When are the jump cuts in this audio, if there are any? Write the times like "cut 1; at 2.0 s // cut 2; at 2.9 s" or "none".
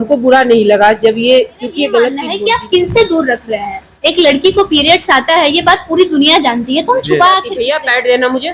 cut 1; at 2.2 s // cut 2; at 7.5 s